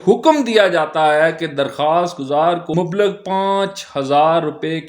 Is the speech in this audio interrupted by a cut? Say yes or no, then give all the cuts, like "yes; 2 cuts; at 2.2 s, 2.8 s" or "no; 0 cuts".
yes; 1 cut; at 2.7 s